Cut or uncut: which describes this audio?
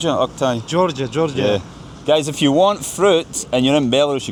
uncut